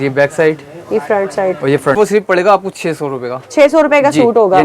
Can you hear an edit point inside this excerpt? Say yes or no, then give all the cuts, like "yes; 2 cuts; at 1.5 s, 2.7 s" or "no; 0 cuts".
yes; 1 cut; at 2.0 s